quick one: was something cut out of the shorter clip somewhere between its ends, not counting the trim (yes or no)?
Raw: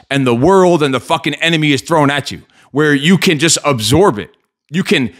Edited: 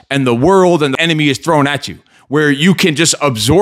yes